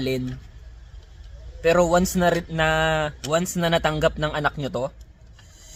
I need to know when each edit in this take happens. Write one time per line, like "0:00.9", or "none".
none